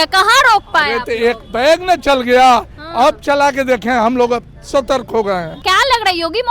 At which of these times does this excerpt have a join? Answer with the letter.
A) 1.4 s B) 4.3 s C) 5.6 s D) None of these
C